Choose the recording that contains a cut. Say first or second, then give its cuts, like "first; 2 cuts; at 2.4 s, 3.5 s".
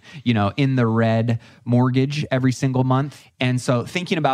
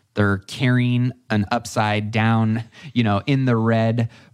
first; 1 cut; at 3.2 s